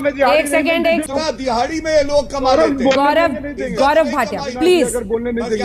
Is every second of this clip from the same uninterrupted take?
no; 1 cut; at 1.0 s

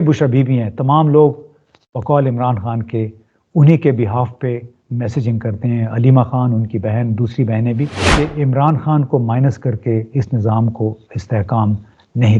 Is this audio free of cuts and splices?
no; 1 cut; at 8.0 s

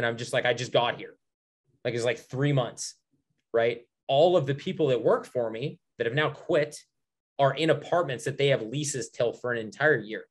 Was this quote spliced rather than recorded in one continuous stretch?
no; 0 cuts

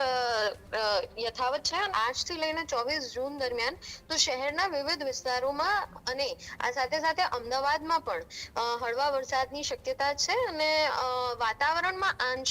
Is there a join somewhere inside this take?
yes; 1 cut; at 1.9 s

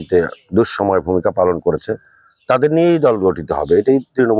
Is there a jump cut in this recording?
no; 0 cuts

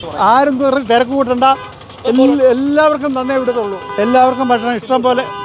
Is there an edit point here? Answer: yes; 1 cut; at 3.8 s

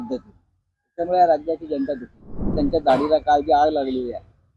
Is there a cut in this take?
yes; 1 cut; at 2.5 s

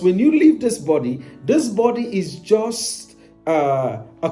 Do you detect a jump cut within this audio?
no; 0 cuts

